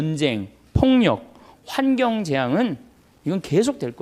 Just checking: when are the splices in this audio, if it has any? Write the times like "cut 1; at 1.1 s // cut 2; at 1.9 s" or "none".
none